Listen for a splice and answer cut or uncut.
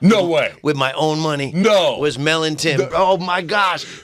cut